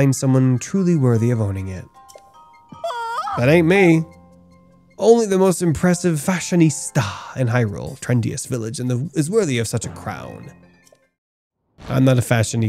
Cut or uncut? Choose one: cut